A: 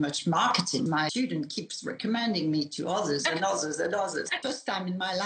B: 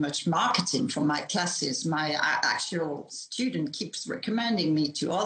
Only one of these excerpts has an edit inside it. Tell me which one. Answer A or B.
A